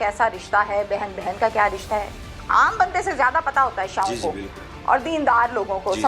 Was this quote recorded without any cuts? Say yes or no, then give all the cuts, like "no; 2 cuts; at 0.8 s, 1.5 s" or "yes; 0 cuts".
yes; 0 cuts